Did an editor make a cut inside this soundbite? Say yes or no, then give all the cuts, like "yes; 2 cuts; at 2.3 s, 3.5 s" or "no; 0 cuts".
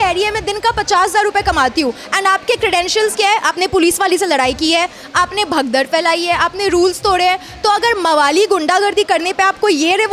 no; 0 cuts